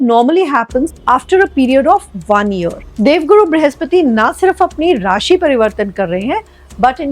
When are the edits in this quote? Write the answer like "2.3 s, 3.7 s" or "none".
none